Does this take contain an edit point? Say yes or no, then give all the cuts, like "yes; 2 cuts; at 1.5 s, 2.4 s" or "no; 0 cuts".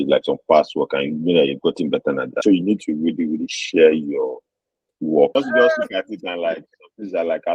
yes; 2 cuts; at 2.4 s, 5.3 s